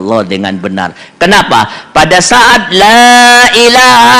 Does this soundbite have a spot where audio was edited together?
no; 0 cuts

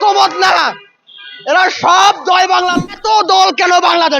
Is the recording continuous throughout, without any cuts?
no; 1 cut; at 2.7 s

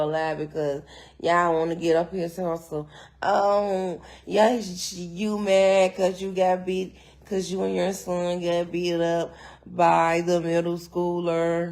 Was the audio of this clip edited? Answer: no; 0 cuts

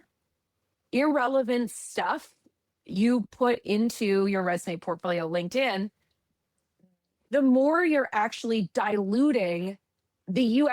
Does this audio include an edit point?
no; 0 cuts

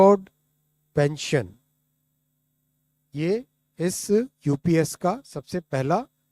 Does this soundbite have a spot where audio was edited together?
no; 0 cuts

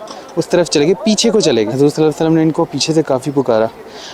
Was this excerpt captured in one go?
no; 1 cut; at 1.7 s

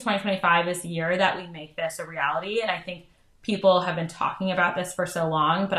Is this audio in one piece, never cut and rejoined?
yes; 0 cuts

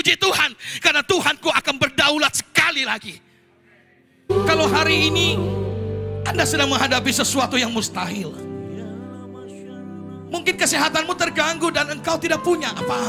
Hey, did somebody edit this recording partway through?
yes; 1 cut; at 4.3 s

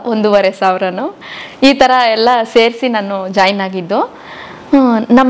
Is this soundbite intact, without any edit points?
yes; 0 cuts

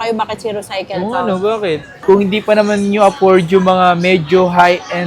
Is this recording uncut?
no; 1 cut; at 2.0 s

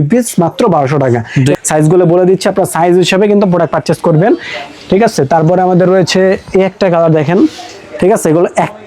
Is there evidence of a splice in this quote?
yes; 1 cut; at 1.6 s

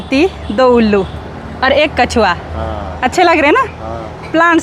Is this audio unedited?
yes; 0 cuts

